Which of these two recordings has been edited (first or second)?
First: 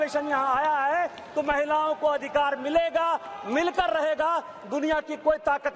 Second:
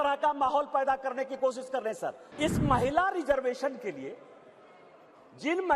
second